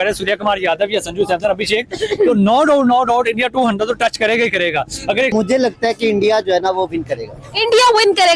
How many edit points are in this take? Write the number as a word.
one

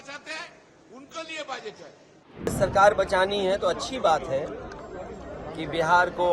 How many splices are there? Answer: one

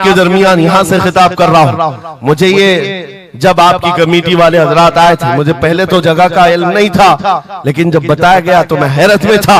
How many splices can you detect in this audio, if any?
zero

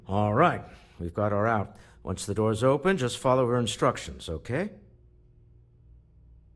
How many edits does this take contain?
one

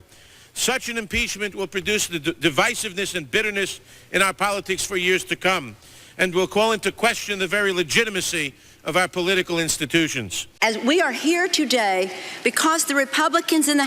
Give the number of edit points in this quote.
one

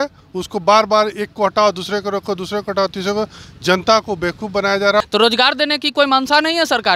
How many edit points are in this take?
one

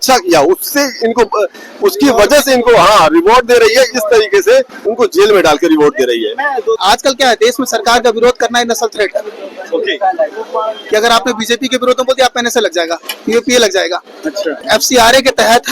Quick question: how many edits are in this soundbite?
two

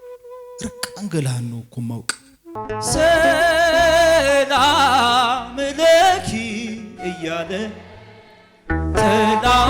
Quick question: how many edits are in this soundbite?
one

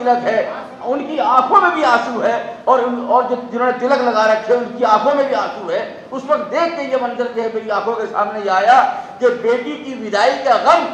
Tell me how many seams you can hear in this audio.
zero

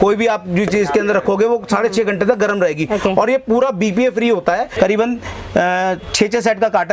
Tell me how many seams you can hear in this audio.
one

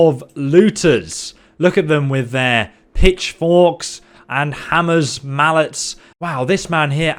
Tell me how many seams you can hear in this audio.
zero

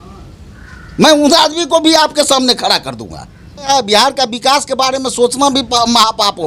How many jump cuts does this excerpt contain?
one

